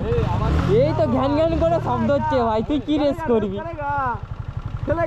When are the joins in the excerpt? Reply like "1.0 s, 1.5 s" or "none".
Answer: 3.7 s